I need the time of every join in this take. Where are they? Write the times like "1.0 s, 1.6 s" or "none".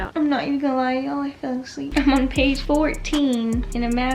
1.9 s